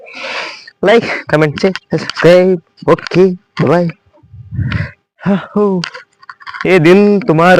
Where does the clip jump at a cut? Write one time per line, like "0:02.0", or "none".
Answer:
none